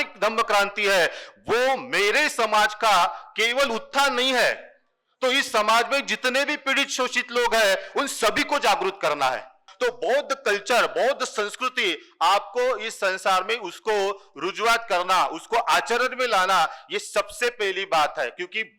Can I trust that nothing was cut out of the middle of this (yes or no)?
no